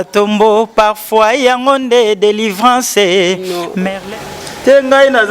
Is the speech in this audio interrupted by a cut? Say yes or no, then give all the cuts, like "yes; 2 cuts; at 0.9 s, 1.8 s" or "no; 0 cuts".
yes; 1 cut; at 3.7 s